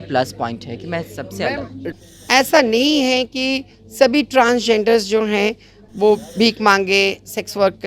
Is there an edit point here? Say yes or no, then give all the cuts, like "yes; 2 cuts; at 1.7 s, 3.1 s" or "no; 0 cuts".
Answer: yes; 1 cut; at 1.9 s